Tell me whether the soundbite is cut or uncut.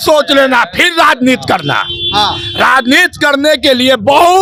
uncut